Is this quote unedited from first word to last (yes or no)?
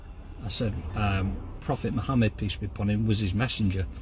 yes